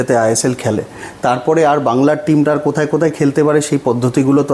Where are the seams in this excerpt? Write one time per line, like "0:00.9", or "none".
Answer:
none

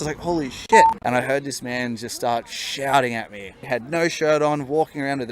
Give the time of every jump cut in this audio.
0:01.0
0:03.6

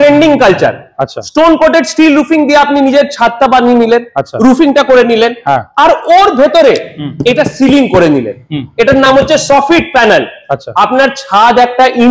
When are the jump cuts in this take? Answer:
none

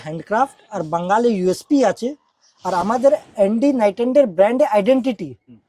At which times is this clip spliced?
none

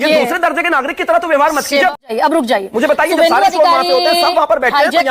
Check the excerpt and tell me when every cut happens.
0:02.0

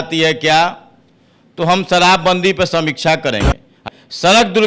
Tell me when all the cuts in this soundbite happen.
0:03.8

